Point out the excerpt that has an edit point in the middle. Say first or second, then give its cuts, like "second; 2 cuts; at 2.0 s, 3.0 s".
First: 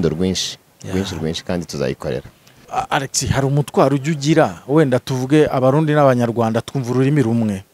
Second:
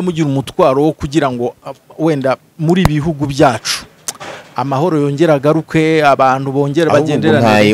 first; 1 cut; at 2.5 s